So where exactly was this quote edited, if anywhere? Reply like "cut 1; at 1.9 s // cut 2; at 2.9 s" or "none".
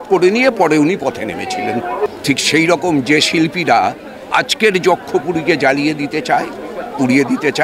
cut 1; at 2.1 s